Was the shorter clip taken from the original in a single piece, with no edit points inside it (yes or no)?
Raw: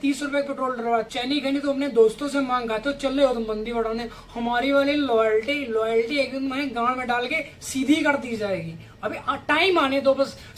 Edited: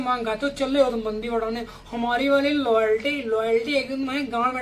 yes